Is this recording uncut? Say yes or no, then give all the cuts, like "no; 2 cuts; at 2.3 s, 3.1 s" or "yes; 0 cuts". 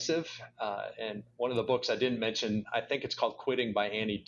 yes; 0 cuts